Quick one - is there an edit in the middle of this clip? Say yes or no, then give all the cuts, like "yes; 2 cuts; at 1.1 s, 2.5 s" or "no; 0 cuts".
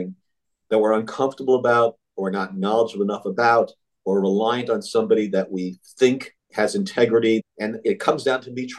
yes; 2 cuts; at 6.4 s, 7.4 s